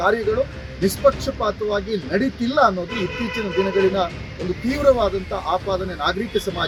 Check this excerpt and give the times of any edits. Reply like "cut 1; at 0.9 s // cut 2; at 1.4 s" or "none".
none